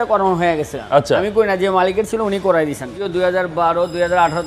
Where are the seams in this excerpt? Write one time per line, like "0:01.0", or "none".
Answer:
0:02.9